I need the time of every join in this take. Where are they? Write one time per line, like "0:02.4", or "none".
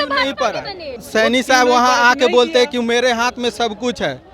0:01.0